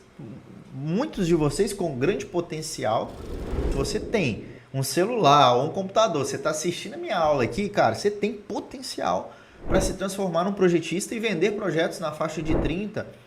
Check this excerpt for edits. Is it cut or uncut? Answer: cut